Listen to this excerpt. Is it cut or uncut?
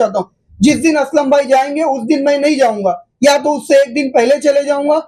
uncut